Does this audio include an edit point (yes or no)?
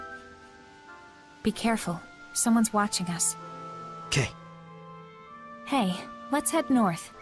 no